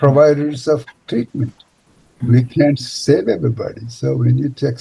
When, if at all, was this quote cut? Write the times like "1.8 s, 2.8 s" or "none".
2.2 s